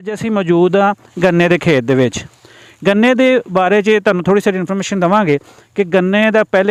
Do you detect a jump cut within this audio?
no; 0 cuts

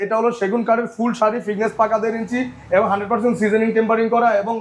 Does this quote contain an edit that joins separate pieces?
no; 0 cuts

